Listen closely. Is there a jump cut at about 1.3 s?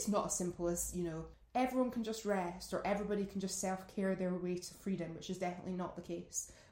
yes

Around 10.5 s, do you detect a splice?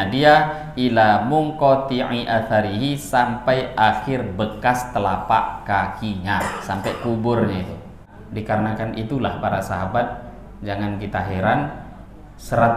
no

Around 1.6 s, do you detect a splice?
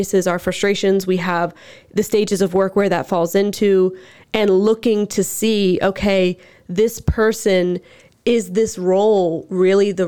no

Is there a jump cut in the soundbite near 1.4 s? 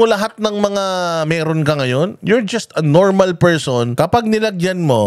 no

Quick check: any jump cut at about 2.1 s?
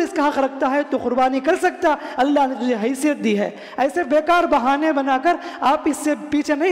no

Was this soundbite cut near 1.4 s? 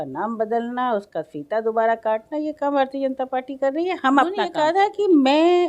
no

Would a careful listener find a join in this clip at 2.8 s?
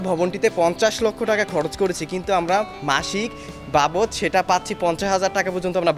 no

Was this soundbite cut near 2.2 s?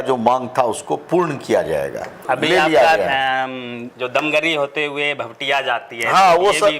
yes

